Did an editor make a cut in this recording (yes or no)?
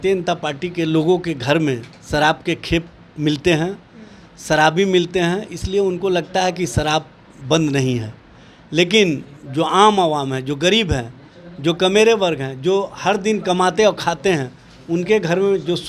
no